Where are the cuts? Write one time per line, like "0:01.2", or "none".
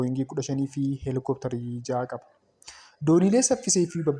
none